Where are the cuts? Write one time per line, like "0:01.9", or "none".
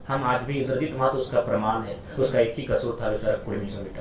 none